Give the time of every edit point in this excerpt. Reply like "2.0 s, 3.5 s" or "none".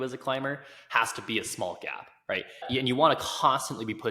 2.7 s